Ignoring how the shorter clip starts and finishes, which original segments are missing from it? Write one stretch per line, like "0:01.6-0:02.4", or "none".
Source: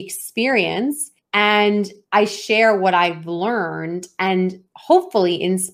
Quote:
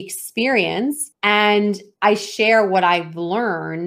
0:01.1-0:01.2